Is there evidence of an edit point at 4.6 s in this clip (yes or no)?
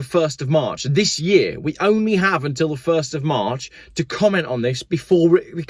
no